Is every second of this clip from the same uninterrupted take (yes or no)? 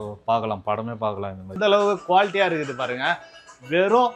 no